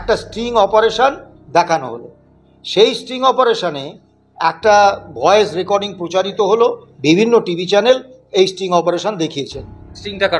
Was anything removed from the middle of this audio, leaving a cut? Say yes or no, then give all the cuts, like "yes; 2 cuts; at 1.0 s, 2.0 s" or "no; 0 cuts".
yes; 1 cut; at 6.9 s